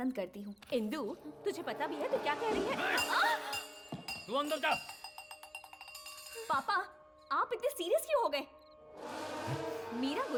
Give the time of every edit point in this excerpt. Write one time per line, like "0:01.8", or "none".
none